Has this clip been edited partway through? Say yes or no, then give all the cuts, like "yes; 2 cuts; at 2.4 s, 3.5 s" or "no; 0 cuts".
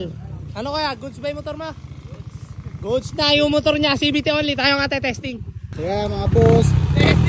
no; 0 cuts